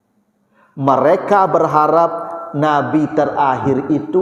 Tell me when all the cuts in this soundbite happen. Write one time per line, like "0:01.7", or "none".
none